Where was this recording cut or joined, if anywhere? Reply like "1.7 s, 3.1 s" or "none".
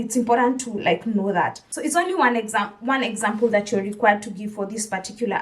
1.6 s